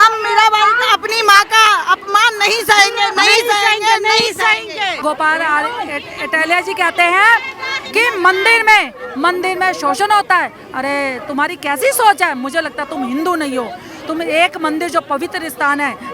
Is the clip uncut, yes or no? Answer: no